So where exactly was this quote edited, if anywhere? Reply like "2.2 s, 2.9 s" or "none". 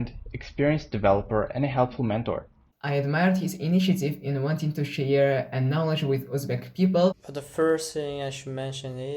2.7 s, 7.2 s